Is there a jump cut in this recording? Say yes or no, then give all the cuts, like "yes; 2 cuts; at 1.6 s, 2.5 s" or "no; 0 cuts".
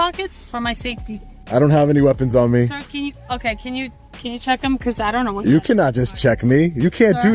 yes; 1 cut; at 1.4 s